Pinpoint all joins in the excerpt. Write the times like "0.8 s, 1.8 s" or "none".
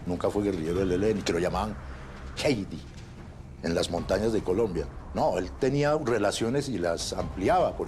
none